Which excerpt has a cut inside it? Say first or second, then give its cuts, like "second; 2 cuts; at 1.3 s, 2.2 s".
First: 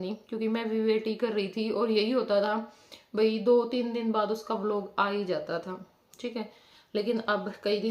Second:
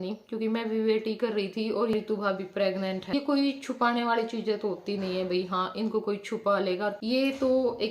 second; 3 cuts; at 1.9 s, 3.1 s, 7.0 s